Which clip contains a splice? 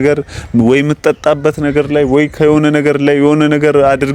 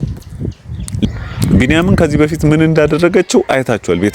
second; 1 cut; at 1.1 s

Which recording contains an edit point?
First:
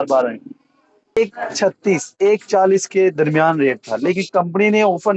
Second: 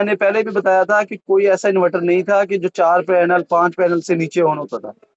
first; 1 cut; at 1.2 s

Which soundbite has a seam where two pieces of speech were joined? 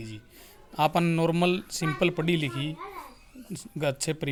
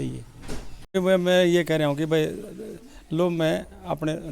second; 1 cut; at 0.9 s

